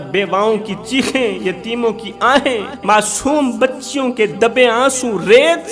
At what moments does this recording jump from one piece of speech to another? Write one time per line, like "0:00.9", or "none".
0:02.7